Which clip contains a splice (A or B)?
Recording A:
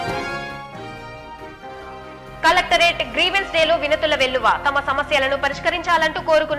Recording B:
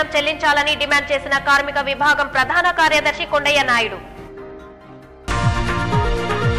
A